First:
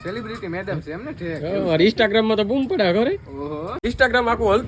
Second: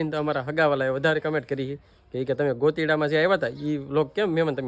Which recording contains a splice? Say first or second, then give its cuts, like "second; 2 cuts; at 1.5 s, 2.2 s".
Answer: first; 1 cut; at 3.7 s